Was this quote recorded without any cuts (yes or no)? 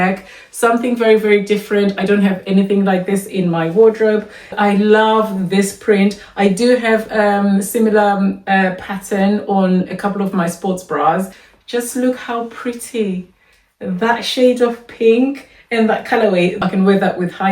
no